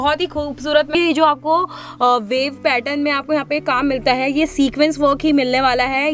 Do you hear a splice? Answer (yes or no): yes